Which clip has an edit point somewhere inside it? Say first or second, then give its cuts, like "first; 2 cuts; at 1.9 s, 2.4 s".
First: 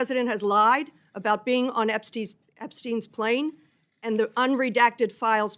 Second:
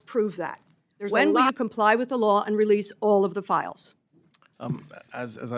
second; 1 cut; at 1.3 s